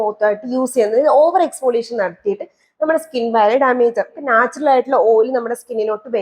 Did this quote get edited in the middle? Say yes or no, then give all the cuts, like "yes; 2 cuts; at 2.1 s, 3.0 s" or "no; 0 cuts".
yes; 1 cut; at 4.1 s